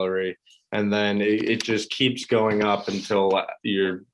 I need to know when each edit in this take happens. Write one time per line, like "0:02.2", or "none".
none